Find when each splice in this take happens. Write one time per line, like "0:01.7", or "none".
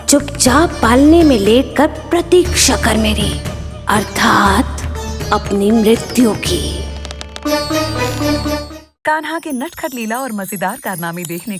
0:08.7